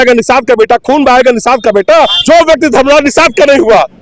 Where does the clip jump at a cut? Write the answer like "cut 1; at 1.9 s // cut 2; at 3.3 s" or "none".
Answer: cut 1; at 2.2 s